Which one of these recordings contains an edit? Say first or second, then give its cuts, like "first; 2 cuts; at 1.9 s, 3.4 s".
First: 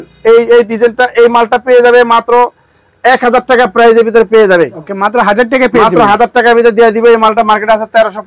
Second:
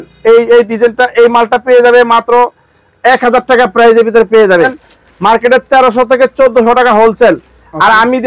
second; 1 cut; at 4.8 s